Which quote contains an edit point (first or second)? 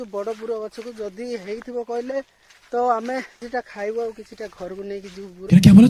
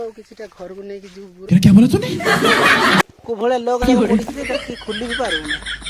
second